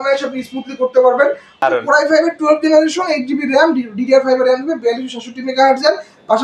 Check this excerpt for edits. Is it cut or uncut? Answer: cut